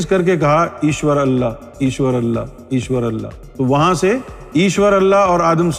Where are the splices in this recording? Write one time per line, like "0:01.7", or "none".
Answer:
0:03.5
0:04.4